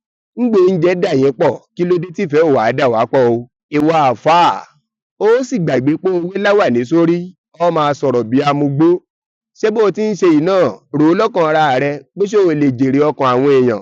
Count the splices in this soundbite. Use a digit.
0